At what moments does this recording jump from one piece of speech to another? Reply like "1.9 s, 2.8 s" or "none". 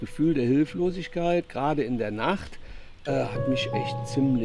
none